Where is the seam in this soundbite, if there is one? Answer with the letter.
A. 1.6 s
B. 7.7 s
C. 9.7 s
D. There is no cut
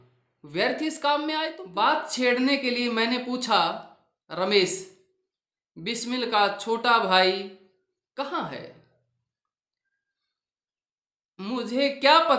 A